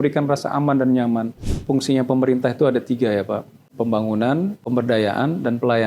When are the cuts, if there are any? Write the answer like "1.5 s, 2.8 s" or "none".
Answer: 1.5 s, 3.6 s, 4.6 s